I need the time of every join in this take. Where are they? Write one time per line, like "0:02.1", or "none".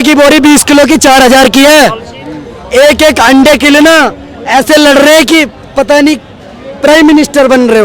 none